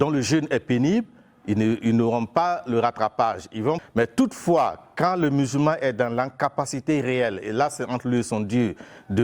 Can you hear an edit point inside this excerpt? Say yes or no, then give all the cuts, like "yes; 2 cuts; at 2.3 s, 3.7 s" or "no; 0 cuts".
yes; 1 cut; at 3.8 s